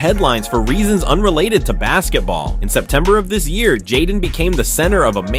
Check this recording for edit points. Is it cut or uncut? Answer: uncut